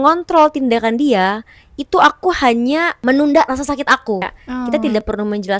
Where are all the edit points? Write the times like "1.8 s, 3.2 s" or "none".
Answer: 2.9 s, 4.7 s